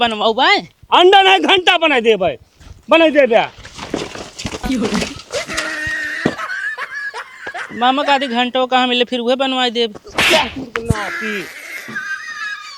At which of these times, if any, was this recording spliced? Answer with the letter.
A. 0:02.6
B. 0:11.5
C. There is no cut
B